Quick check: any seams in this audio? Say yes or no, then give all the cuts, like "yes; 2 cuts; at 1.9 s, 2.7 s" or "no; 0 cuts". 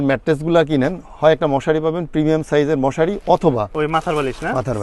yes; 1 cut; at 3.7 s